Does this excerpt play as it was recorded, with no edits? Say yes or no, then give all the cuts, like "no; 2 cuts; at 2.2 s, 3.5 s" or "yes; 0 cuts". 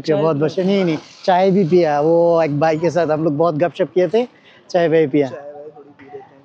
yes; 0 cuts